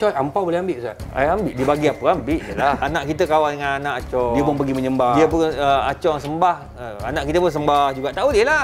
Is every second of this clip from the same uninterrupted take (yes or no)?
no